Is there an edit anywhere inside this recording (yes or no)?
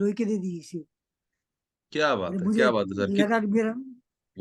no